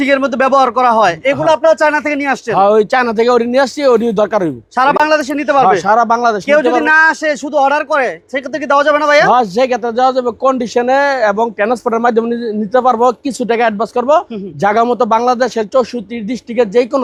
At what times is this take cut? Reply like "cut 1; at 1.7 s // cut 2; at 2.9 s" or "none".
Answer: none